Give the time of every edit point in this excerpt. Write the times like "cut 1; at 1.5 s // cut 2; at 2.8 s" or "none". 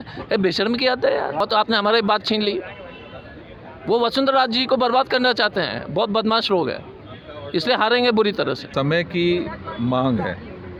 none